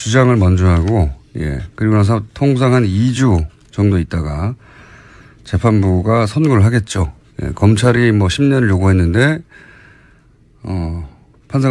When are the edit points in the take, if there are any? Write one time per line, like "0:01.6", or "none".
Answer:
0:08.3

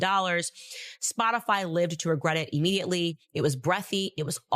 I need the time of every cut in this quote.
0:03.2

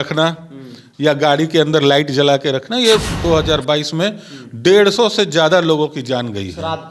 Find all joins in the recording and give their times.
0:03.1

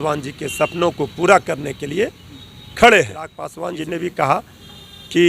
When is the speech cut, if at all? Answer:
0:03.5

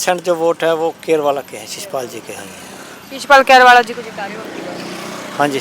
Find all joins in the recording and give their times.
none

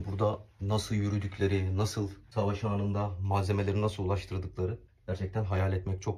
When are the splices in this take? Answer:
0:02.2
0:04.9

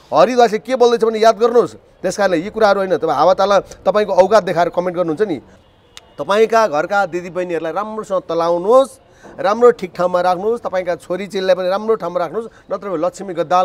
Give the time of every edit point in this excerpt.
0:05.5

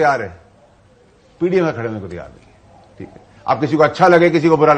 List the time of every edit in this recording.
none

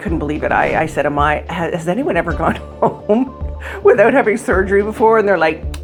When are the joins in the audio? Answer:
none

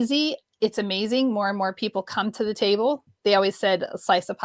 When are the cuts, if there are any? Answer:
none

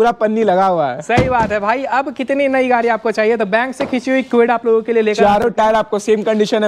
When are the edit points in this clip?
none

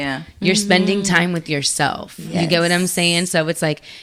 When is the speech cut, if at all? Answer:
none

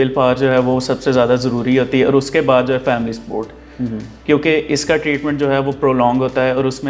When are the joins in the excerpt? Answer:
none

